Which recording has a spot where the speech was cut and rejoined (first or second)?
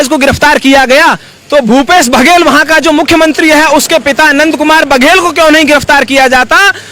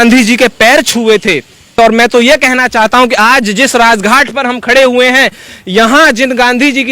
second